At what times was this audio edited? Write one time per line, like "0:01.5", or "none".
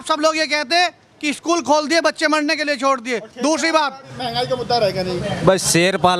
0:04.1

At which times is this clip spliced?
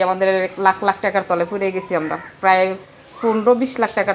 none

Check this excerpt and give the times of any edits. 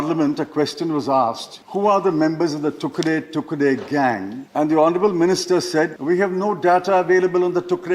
0:01.5
0:04.4
0:06.0

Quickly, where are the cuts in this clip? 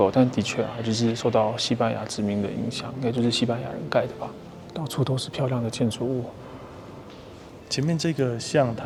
none

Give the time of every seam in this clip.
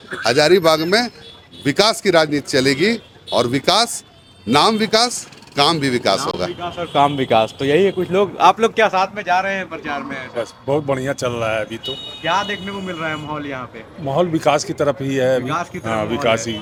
none

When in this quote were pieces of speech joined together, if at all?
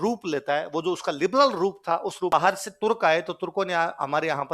0:02.3

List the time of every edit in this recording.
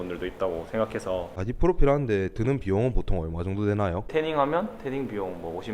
0:01.3
0:04.1

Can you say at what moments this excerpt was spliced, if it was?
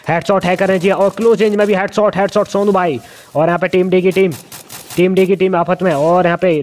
none

